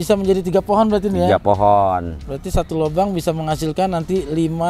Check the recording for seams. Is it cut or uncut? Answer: uncut